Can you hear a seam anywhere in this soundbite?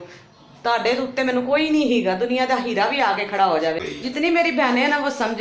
yes; 1 cut; at 3.9 s

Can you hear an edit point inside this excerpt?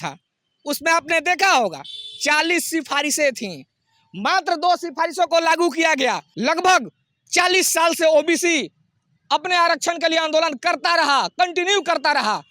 yes; 1 cut; at 6.3 s

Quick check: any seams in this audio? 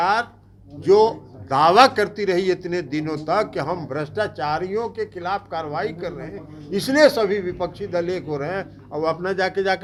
no; 0 cuts

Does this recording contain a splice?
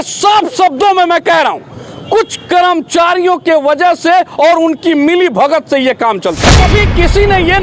yes; 1 cut; at 6.5 s

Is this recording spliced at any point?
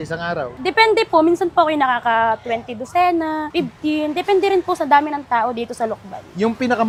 no; 0 cuts

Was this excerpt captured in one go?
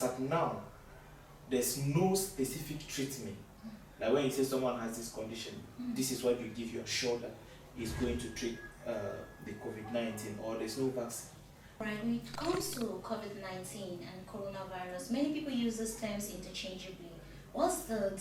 no; 1 cut; at 11.8 s

